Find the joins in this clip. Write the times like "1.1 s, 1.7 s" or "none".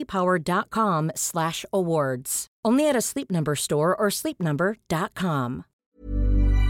5.7 s